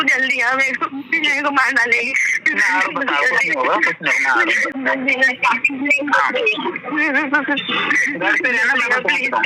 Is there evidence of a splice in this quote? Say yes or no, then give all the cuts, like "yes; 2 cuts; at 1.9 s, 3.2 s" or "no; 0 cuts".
no; 0 cuts